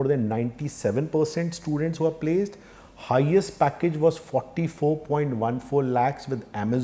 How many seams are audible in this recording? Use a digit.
0